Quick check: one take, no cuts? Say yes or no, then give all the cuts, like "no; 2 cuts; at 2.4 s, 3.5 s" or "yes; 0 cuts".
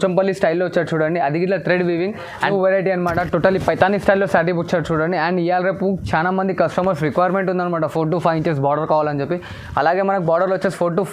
no; 1 cut; at 2.4 s